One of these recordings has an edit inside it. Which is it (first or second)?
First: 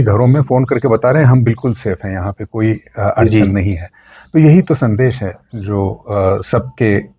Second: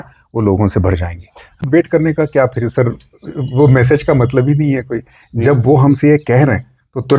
second